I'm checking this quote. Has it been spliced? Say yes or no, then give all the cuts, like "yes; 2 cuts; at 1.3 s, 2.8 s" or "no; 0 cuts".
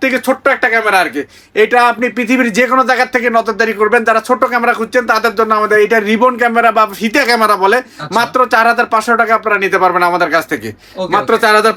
no; 0 cuts